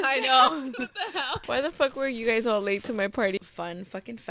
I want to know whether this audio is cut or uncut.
cut